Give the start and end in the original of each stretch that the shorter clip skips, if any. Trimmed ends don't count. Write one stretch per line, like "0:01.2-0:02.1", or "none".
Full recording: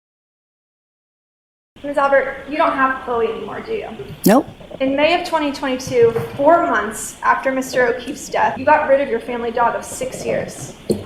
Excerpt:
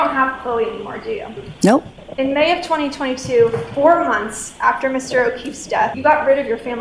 none

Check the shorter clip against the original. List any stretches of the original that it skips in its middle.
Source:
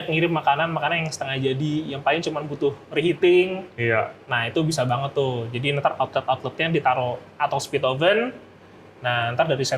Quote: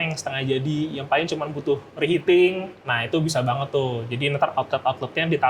0:03.7-0:04.2

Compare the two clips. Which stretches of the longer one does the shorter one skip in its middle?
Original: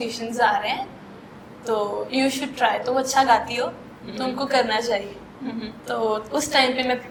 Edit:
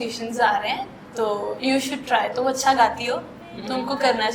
0:01.0-0:01.5

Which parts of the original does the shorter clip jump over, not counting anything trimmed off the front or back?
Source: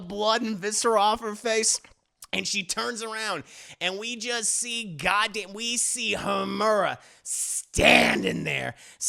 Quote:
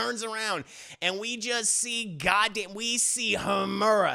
none

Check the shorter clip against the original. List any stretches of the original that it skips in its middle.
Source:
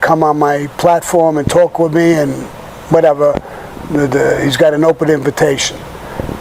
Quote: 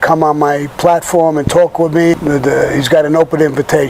0:02.2-0:03.8

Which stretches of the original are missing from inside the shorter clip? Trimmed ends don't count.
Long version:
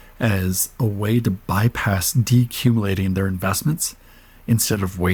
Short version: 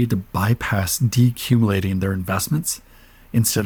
none

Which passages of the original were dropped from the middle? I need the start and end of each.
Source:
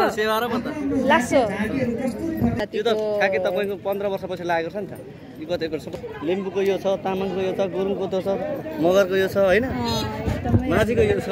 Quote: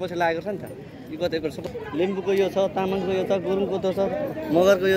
none

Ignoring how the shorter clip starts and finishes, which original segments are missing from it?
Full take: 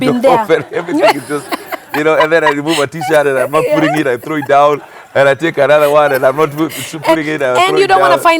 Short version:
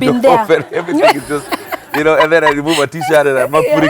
none

